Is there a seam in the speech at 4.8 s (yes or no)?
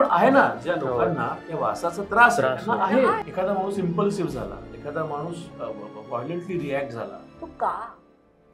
no